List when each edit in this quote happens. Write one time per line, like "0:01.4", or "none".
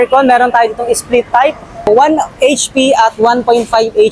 0:01.9

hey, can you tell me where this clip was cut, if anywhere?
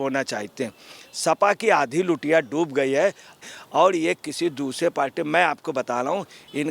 0:03.4

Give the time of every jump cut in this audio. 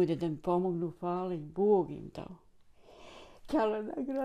none

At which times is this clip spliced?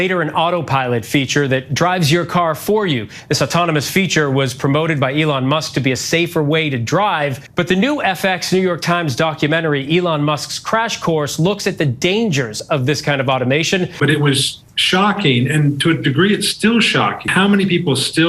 0:07.4
0:14.0
0:17.2

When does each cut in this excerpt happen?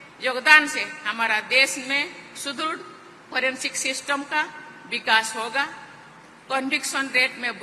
none

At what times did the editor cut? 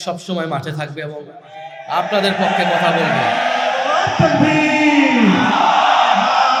none

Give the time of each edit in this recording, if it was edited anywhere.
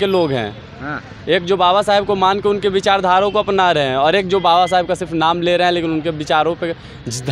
none

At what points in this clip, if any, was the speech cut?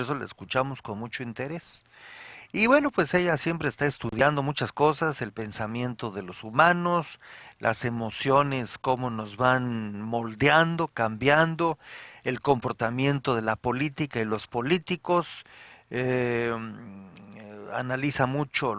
none

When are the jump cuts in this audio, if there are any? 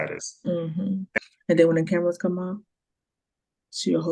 0:01.2

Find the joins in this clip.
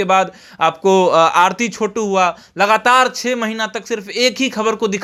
none

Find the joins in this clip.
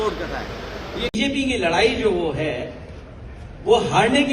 0:01.1

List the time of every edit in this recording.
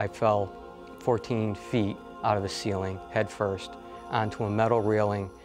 none

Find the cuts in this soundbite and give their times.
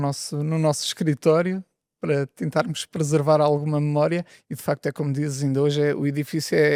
none

